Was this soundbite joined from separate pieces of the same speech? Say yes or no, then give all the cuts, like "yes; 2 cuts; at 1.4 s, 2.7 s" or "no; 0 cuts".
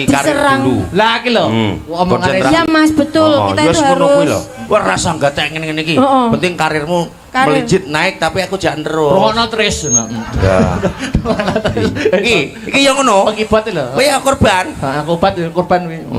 no; 0 cuts